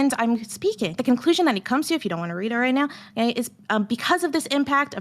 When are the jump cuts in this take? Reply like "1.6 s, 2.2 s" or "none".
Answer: 1.0 s